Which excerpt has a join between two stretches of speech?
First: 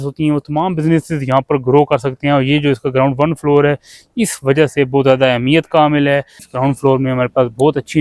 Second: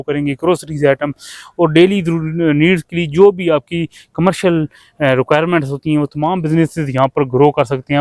first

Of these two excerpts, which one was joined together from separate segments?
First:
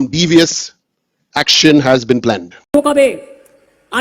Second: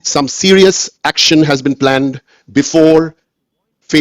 first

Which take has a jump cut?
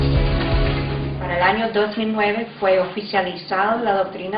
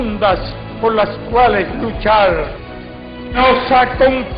first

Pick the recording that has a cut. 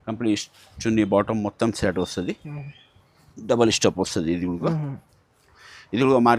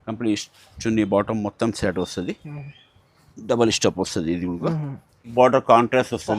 second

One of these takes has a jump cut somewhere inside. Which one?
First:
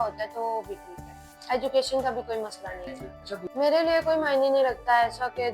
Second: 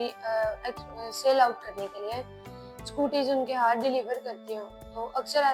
first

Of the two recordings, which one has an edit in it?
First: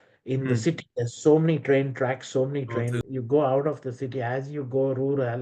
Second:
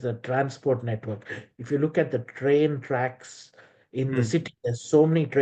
first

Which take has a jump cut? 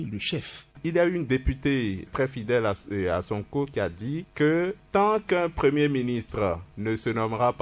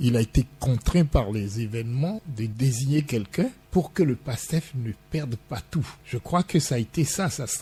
first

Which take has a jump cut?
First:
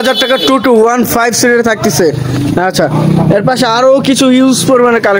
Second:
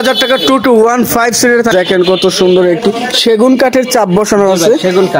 second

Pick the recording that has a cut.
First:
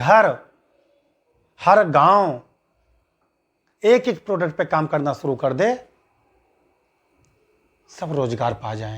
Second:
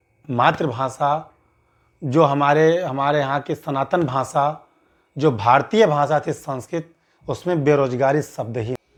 first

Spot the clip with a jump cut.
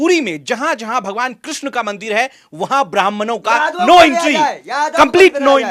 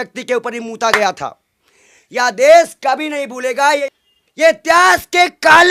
second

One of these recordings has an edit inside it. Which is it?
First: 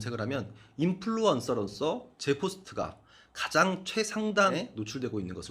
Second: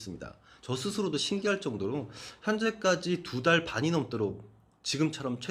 first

